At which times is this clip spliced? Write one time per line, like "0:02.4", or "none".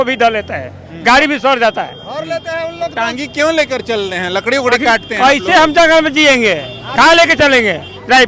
none